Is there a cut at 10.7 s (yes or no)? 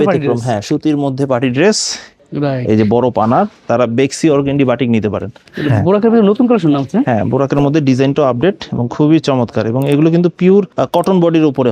yes